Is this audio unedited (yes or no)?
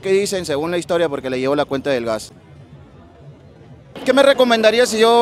yes